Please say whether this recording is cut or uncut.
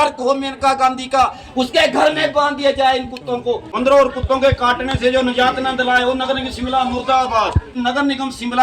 cut